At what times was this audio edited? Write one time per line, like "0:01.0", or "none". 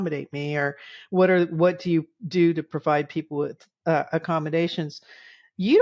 none